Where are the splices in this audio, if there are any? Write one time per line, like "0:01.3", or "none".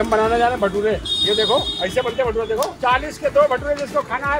0:01.1
0:02.7